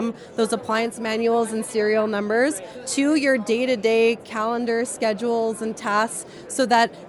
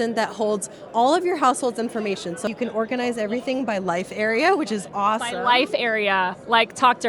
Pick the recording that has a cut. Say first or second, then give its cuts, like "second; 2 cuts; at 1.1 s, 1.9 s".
second; 1 cut; at 2.5 s